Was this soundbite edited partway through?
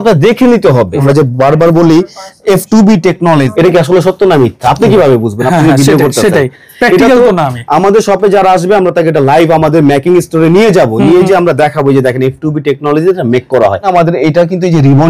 yes; 3 cuts; at 1.0 s, 3.5 s, 13.9 s

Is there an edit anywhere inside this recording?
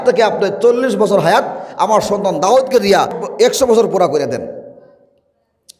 yes; 1 cut; at 3.2 s

